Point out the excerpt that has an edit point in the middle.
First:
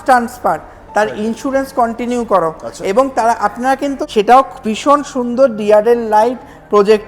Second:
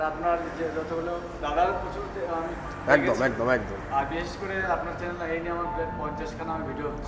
first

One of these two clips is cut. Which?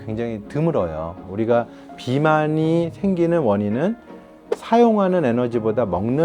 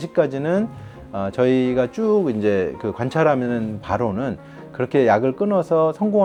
first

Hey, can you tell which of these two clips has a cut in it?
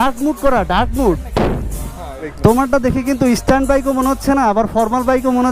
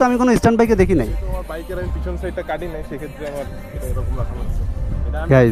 first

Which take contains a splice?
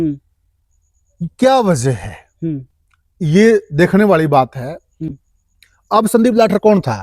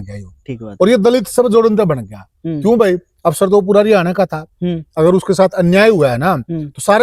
first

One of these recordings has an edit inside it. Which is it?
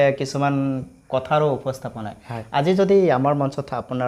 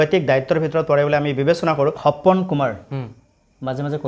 second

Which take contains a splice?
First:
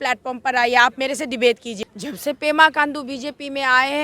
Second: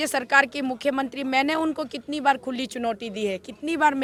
first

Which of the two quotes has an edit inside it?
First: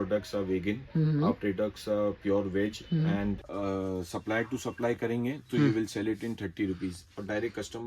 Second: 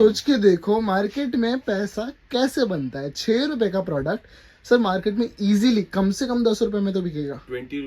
first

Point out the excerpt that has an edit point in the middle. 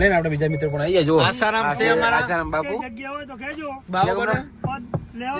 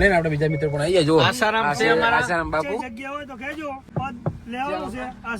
second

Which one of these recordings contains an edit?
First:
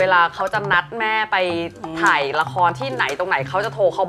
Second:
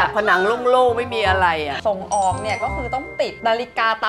second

